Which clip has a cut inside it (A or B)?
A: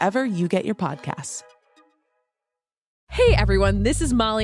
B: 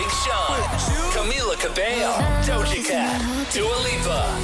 A